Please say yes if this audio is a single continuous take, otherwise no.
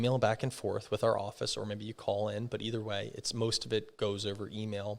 yes